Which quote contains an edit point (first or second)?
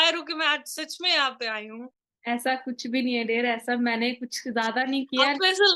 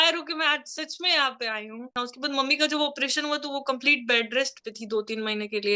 second